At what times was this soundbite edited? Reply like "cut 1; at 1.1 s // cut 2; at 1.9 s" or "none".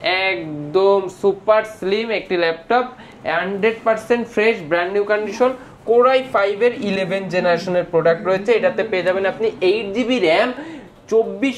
none